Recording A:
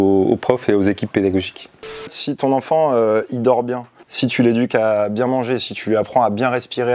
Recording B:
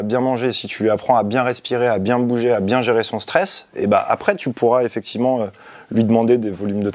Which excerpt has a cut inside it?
A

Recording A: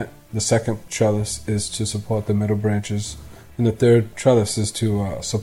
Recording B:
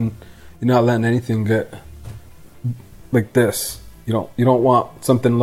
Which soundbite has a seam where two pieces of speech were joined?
A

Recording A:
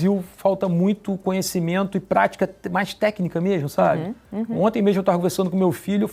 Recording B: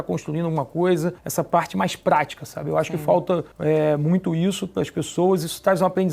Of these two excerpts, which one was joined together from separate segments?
B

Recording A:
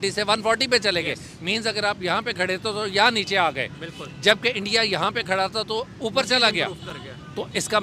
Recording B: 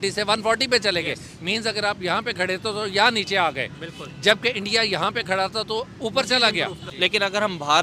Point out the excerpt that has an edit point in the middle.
B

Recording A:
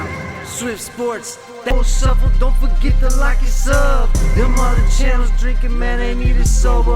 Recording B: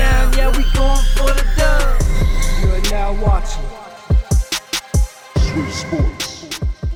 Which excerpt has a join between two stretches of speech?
A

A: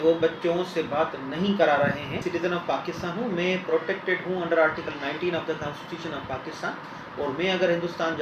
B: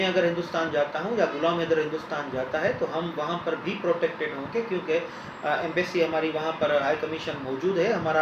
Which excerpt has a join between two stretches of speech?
A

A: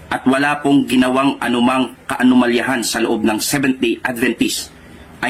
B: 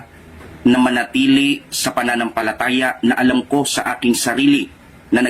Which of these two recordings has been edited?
B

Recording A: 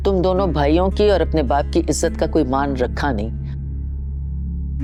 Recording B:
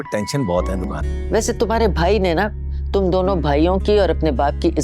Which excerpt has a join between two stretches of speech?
B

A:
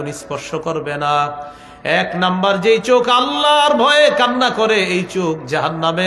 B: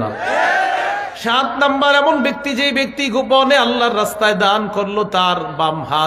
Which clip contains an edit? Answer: B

